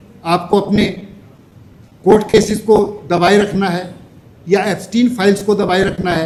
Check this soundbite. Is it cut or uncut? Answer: uncut